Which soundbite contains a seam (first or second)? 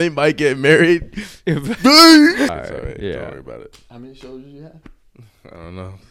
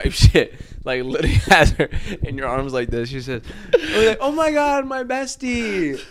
first